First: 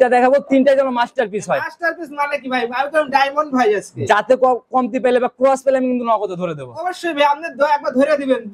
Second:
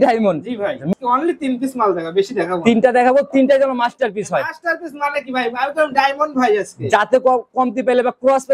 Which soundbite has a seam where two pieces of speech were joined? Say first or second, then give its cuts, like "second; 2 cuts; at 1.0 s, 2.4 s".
second; 1 cut; at 0.9 s